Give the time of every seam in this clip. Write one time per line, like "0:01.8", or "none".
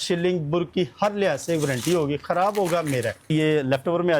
0:03.3